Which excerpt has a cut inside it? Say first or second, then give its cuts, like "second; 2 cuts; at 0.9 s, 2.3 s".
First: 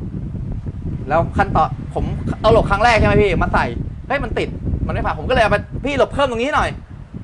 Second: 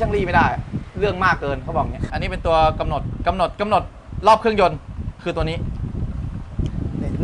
second; 1 cut; at 2.0 s